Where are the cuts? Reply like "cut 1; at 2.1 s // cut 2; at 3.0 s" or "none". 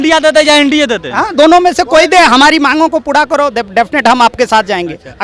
none